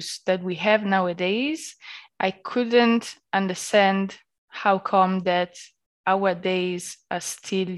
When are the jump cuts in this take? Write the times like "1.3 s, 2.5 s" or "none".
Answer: none